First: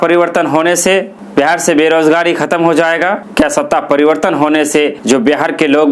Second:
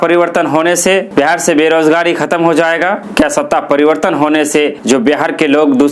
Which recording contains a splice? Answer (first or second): second